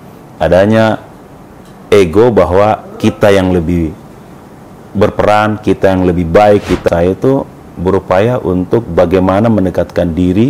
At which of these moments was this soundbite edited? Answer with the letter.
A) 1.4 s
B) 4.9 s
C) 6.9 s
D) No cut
C